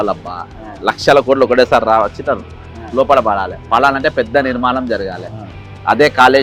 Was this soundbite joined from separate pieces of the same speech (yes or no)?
no